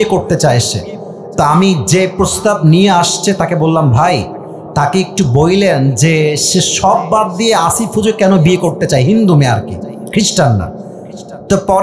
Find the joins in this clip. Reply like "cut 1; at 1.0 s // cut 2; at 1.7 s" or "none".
none